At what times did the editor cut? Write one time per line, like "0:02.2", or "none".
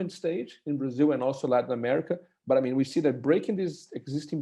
none